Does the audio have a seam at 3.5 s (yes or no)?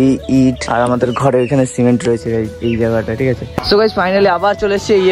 yes